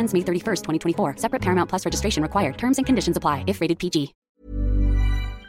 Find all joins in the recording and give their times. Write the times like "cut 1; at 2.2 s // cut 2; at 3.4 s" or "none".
cut 1; at 4.2 s